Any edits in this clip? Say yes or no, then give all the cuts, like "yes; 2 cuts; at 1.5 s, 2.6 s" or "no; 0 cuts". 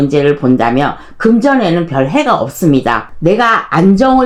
no; 0 cuts